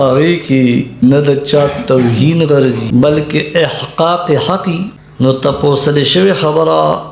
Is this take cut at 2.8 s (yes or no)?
yes